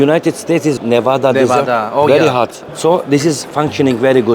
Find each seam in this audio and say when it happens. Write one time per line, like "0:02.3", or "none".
0:00.8
0:02.6
0:03.4